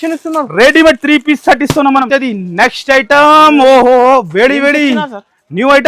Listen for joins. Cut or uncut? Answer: cut